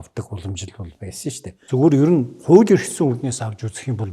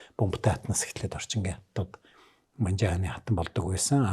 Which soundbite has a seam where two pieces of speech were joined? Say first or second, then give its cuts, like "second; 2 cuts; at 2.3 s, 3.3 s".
first; 1 cut; at 1.6 s